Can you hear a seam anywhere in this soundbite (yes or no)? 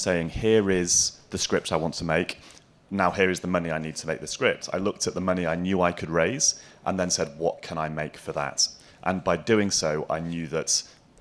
no